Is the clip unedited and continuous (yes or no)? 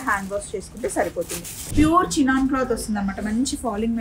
no